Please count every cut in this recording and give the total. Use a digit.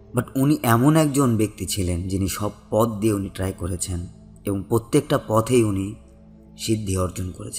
0